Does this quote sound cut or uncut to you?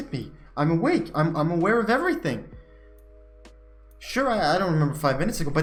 uncut